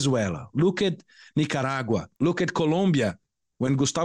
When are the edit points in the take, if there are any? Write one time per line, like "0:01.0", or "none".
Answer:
0:02.1